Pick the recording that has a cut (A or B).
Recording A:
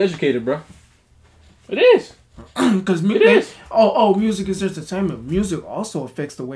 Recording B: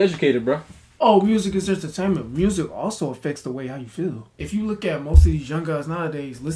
B